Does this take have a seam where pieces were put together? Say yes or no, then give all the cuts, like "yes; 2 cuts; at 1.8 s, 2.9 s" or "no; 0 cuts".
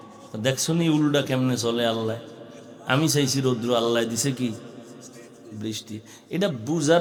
no; 0 cuts